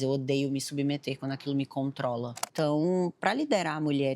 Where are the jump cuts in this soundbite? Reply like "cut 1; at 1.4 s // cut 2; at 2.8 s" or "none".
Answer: cut 1; at 2.4 s

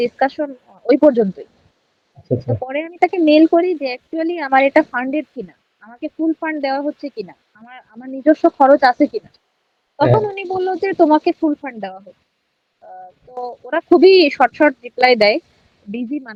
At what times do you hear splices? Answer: none

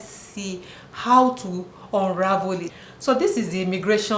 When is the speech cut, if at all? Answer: cut 1; at 2.7 s

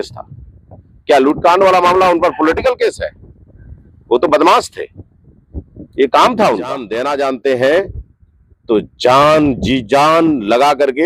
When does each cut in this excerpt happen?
cut 1; at 6.9 s

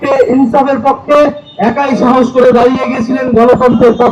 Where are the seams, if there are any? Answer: none

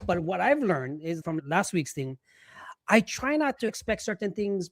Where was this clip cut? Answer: cut 1; at 1.3 s // cut 2; at 3.8 s

